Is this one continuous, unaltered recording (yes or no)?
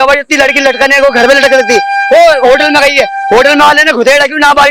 yes